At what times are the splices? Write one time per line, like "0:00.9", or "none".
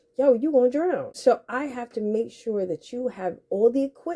0:01.1